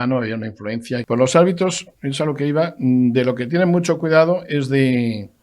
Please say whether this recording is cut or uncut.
cut